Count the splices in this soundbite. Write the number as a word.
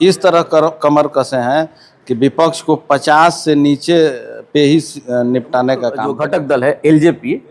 one